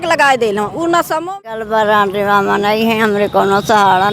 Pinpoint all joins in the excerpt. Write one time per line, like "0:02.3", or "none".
0:01.3